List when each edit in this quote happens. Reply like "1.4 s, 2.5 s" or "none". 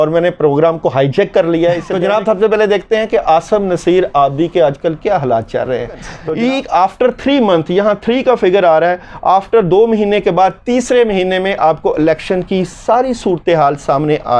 1.9 s, 6.1 s